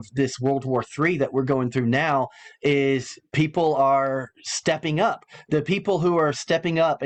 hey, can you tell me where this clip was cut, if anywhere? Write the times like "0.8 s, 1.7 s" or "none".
none